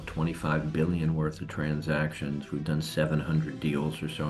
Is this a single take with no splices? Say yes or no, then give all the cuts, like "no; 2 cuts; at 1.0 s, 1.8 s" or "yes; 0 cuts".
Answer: yes; 0 cuts